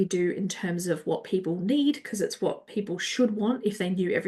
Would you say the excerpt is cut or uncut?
uncut